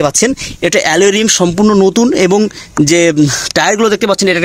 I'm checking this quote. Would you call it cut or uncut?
uncut